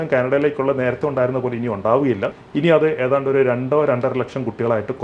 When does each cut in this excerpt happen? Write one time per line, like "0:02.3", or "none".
0:02.4